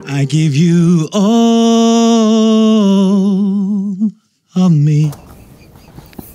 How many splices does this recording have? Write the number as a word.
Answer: zero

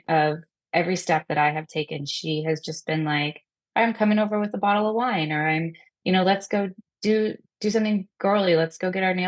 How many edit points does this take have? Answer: zero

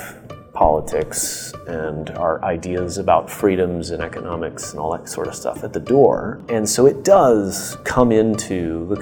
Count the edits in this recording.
one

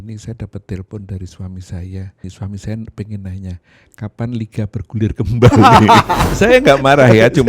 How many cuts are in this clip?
two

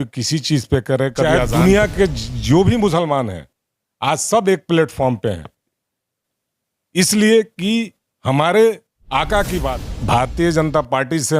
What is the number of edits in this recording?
two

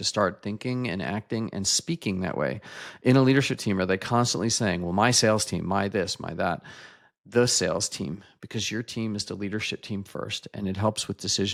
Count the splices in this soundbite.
zero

